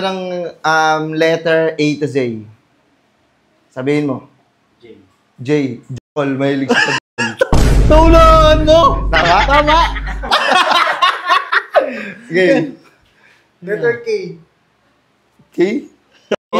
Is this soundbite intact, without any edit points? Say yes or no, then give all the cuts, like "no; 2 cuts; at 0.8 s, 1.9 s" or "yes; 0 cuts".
yes; 0 cuts